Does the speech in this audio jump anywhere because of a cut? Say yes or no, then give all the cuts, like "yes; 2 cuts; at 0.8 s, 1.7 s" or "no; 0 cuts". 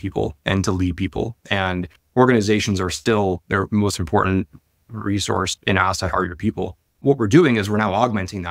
yes; 1 cut; at 6.8 s